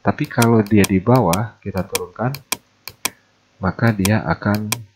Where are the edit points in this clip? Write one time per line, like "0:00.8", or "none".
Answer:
none